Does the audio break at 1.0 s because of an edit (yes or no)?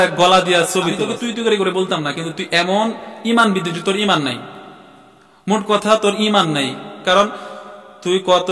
yes